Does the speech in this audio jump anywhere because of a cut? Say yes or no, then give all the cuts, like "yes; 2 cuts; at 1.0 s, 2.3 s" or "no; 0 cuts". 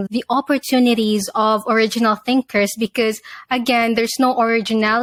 no; 0 cuts